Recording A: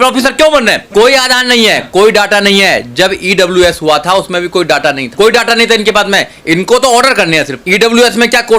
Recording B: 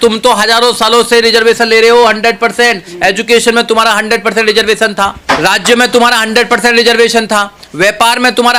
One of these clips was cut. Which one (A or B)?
A